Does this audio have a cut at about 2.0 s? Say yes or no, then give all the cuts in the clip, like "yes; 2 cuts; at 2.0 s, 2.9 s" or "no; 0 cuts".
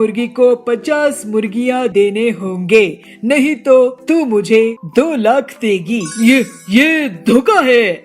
no; 1 cut; at 6.1 s